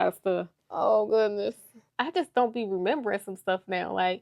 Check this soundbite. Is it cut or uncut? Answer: cut